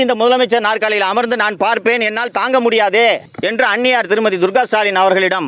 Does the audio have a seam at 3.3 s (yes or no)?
yes